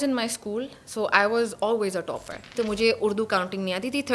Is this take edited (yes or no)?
yes